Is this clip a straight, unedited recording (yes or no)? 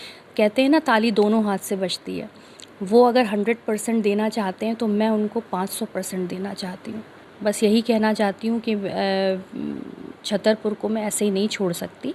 no